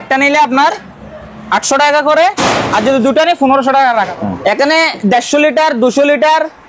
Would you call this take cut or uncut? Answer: cut